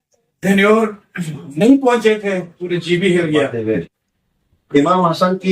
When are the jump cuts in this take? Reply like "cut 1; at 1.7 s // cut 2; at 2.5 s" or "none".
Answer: cut 1; at 3.6 s